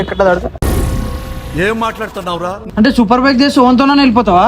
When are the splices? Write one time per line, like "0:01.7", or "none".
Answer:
0:02.7